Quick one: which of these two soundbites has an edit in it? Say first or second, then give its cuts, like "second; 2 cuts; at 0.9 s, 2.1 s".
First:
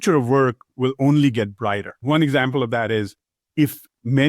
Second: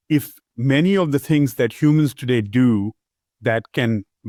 first; 1 cut; at 1.9 s